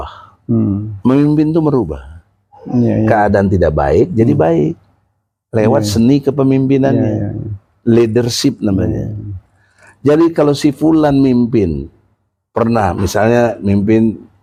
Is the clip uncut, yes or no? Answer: yes